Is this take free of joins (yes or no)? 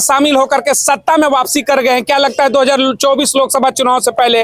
yes